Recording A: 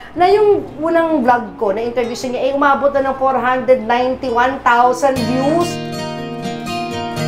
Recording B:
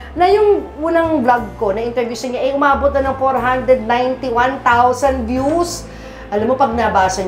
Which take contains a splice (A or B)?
B